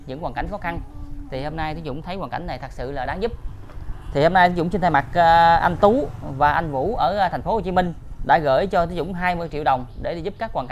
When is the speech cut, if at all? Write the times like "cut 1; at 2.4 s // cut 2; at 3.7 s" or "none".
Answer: none